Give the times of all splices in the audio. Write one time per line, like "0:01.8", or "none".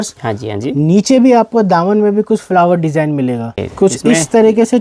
0:03.6